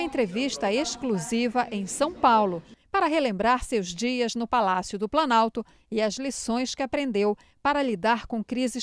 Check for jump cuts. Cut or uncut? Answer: cut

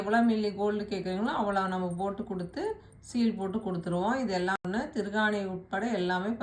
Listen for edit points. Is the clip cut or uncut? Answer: cut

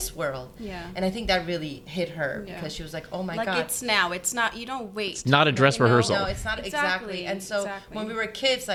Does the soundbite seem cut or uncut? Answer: uncut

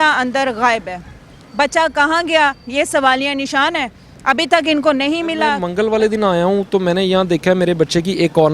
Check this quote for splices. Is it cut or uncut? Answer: cut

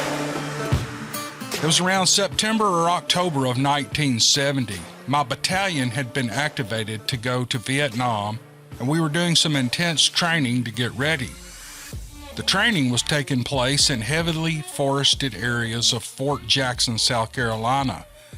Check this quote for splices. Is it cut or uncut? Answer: cut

